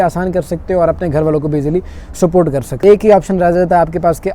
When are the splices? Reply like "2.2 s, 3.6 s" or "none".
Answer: 2.7 s